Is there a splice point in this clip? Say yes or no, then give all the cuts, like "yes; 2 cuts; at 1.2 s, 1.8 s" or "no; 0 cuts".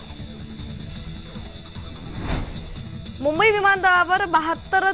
yes; 1 cut; at 1.8 s